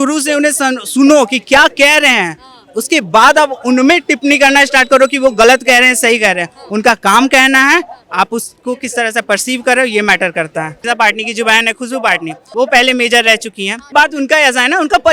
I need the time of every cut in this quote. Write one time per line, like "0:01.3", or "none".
0:10.8
0:12.4
0:13.8